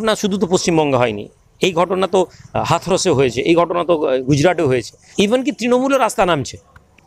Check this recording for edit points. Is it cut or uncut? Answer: cut